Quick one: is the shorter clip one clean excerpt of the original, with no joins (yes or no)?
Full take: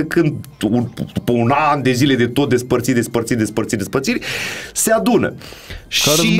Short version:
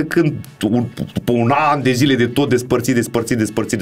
yes